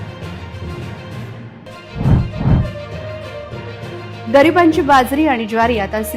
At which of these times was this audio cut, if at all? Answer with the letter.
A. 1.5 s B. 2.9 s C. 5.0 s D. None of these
A